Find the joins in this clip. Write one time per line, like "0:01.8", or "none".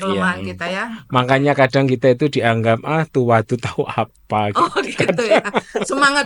none